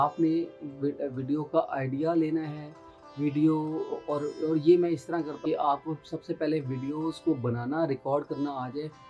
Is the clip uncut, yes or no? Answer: no